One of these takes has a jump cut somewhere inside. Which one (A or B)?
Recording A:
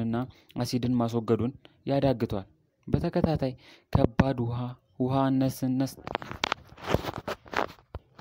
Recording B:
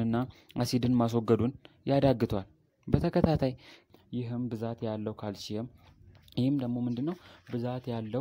B